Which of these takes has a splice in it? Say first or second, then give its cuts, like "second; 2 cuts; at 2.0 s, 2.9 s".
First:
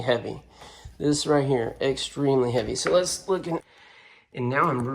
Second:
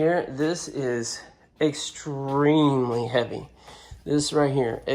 first; 1 cut; at 3.6 s